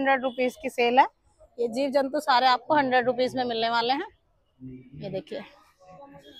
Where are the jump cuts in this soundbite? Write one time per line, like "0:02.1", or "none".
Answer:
none